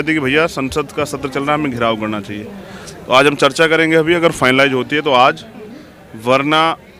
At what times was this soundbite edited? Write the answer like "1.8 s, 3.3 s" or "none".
none